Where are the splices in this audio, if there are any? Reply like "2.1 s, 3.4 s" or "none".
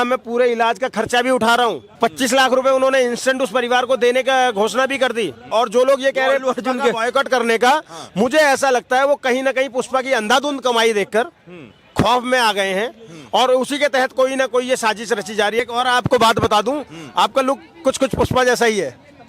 1.9 s, 5.5 s, 15.6 s